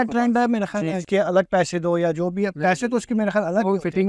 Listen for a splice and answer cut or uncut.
cut